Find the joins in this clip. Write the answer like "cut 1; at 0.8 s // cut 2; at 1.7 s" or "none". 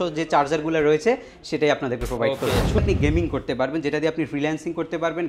cut 1; at 2.8 s